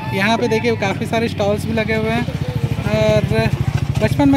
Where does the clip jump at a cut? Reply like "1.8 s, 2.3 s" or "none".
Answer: none